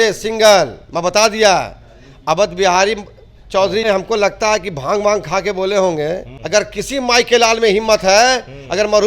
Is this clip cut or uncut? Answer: cut